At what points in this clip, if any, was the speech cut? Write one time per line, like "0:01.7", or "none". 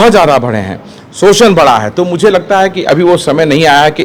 none